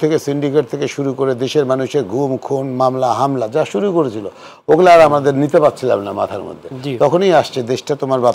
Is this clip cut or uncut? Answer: uncut